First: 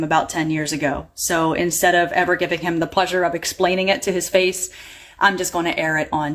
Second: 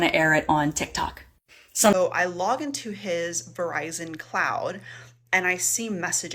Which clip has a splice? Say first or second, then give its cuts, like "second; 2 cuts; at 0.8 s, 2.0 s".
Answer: second; 1 cut; at 1.9 s